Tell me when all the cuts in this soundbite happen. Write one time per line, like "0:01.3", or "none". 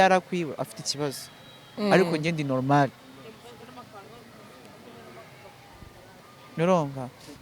none